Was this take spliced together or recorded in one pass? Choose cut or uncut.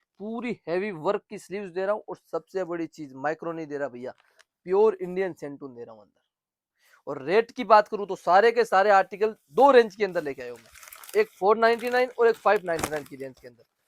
uncut